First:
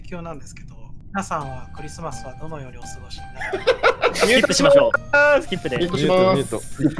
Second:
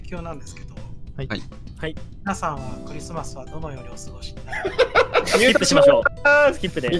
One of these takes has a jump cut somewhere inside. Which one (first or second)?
first